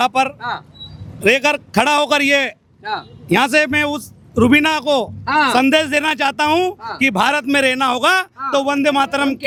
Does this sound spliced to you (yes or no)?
no